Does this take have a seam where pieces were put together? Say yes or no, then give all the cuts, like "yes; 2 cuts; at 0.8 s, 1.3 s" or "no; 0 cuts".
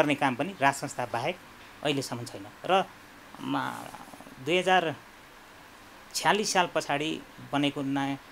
no; 0 cuts